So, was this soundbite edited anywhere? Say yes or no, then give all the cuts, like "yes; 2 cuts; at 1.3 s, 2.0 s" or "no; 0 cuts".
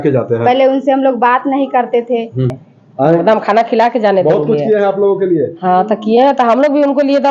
yes; 1 cut; at 2.5 s